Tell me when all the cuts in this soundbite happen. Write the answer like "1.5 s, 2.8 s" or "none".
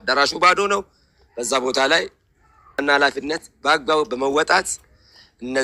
2.8 s